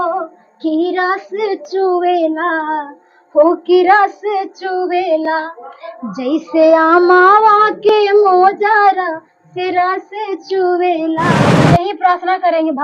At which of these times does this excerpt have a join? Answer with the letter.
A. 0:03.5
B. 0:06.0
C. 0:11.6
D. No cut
C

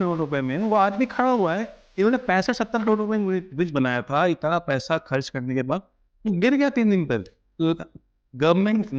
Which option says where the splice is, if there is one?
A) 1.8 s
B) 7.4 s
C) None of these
B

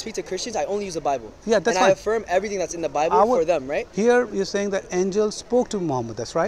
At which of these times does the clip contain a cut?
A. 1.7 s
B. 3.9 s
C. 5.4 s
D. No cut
B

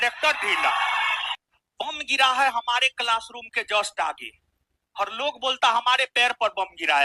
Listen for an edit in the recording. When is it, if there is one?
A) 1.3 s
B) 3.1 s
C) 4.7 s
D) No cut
A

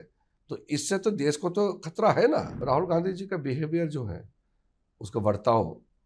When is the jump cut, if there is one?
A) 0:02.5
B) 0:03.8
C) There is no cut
A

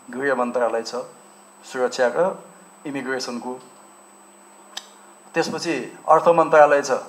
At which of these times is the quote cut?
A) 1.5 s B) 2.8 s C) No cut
C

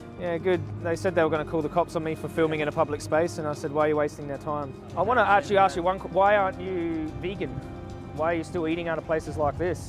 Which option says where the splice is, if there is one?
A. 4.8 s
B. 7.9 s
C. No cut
A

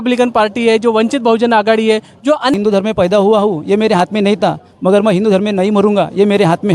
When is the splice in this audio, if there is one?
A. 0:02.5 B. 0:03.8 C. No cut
A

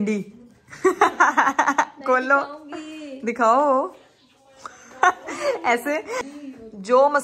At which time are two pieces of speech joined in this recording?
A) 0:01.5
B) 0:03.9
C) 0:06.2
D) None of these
C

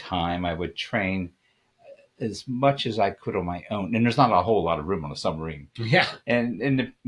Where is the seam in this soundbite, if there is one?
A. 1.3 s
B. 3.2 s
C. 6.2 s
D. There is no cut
C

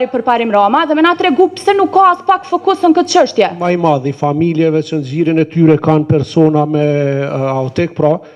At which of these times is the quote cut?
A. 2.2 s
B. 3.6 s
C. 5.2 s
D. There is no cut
B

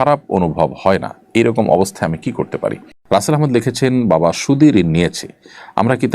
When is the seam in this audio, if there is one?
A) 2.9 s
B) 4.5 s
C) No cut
A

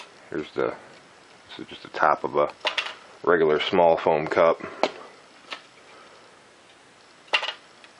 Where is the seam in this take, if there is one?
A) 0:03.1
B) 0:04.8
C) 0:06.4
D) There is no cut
D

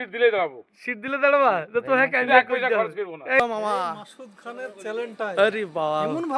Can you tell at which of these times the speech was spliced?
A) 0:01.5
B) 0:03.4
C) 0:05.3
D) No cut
B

